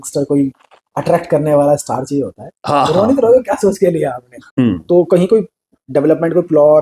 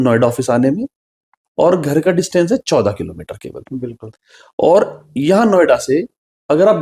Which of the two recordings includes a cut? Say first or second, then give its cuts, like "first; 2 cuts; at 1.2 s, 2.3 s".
first; 1 cut; at 4.4 s